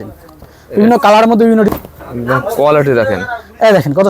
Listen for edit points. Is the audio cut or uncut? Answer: cut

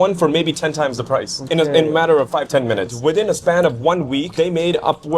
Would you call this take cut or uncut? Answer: cut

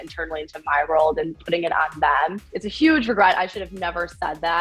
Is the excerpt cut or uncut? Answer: cut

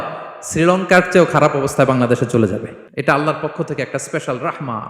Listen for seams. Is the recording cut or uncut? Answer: cut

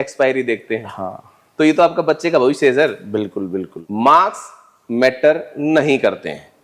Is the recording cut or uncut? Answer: cut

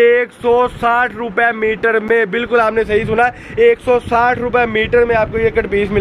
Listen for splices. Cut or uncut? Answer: uncut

